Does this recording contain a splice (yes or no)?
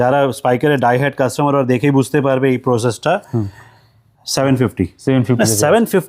no